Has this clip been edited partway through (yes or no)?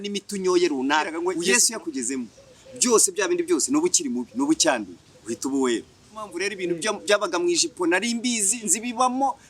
yes